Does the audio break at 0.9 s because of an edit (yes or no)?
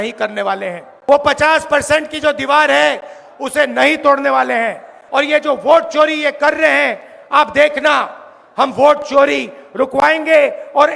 yes